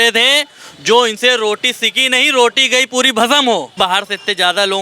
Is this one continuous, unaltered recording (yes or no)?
no